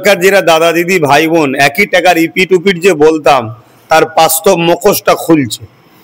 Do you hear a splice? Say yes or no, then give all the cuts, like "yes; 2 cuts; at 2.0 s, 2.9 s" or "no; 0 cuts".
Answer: no; 0 cuts